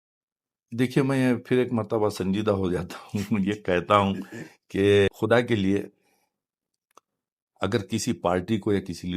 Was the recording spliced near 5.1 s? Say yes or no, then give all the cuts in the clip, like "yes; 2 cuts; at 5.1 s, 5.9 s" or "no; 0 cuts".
yes; 1 cut; at 5.1 s